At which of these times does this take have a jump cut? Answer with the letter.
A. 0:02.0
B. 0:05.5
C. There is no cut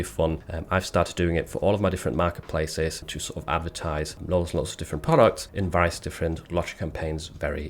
B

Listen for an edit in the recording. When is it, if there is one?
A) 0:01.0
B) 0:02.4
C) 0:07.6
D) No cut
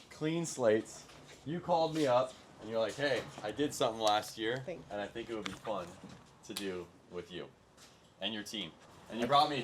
D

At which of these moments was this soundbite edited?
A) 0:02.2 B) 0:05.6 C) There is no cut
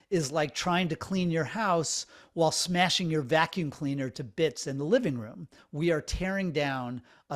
B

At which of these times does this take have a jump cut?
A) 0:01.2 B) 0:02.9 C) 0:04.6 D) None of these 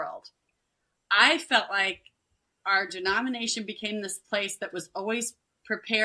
B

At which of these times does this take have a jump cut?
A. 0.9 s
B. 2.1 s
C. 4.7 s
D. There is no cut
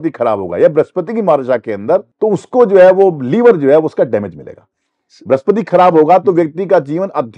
B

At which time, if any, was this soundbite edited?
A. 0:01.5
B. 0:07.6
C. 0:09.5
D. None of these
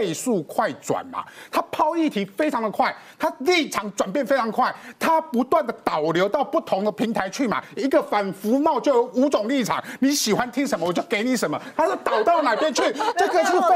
D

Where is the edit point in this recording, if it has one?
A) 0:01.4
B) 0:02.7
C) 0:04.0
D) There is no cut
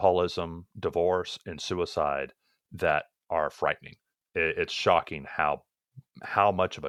D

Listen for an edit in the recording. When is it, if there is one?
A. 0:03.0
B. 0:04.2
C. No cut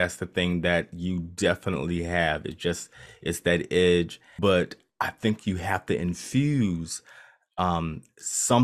B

